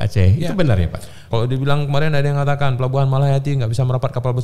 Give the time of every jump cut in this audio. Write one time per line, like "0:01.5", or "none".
0:01.3